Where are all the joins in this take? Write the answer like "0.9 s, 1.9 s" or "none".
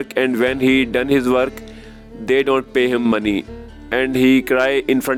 none